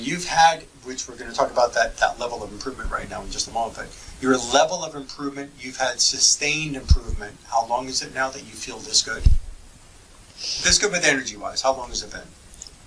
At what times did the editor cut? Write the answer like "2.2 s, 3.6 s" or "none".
none